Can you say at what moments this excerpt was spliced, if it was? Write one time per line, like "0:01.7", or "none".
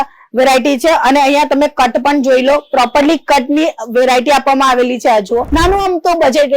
0:05.5